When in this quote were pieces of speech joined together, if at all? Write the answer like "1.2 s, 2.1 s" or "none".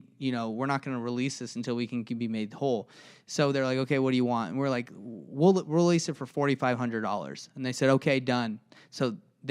none